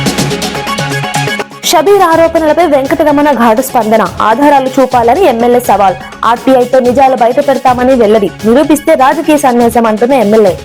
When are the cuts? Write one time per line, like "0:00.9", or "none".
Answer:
0:01.0